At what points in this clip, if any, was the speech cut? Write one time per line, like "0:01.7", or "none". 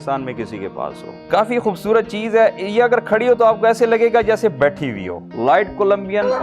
0:01.2
0:05.2